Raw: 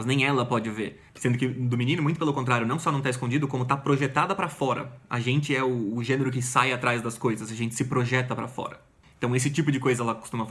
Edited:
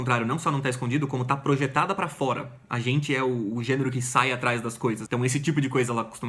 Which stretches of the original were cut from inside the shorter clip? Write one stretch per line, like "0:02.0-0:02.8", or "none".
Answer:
0:07.4-0:09.1